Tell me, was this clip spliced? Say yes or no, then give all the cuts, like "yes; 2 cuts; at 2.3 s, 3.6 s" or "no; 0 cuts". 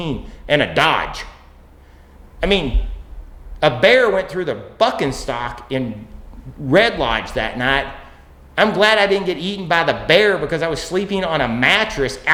no; 0 cuts